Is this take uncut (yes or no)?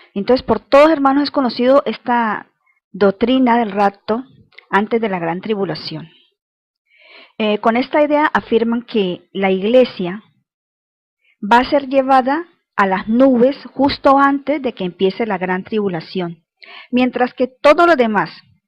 no